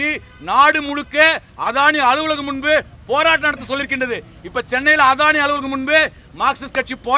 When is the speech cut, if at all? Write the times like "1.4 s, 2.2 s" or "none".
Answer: none